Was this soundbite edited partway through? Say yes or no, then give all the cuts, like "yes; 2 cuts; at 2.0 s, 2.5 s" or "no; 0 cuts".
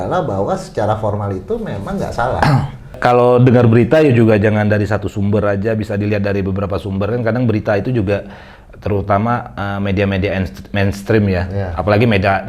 yes; 1 cut; at 3.0 s